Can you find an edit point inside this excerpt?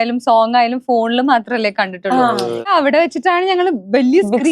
yes; 1 cut; at 2.7 s

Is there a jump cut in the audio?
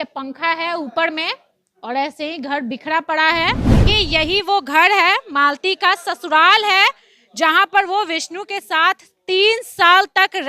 yes; 1 cut; at 3.8 s

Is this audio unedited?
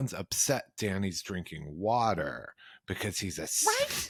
yes; 0 cuts

